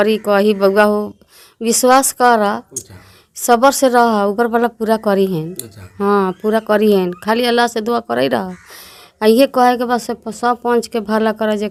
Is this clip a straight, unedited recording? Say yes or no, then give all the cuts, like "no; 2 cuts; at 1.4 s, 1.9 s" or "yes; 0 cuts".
yes; 0 cuts